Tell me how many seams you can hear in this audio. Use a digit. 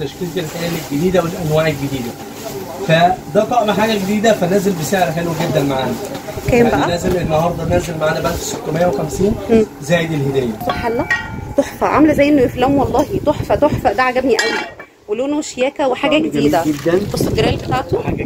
1